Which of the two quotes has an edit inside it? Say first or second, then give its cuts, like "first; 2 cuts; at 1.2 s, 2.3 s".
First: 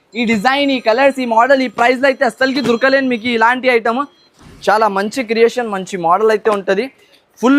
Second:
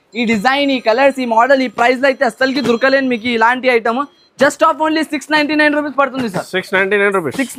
first; 1 cut; at 4.2 s